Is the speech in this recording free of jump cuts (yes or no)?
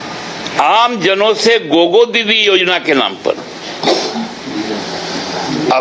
no